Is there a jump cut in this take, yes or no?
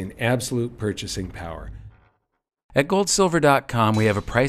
yes